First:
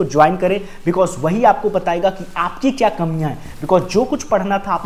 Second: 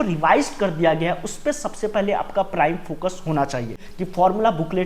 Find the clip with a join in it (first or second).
second